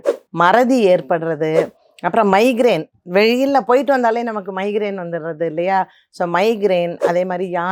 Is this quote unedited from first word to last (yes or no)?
yes